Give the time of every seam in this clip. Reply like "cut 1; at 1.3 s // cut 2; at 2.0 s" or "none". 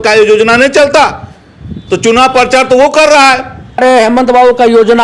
cut 1; at 3.8 s